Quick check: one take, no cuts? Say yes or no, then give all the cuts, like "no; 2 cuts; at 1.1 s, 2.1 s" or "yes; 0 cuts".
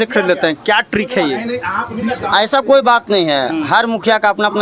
yes; 0 cuts